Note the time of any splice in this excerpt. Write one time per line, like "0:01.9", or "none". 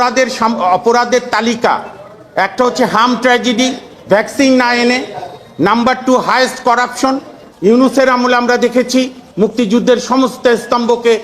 0:07.4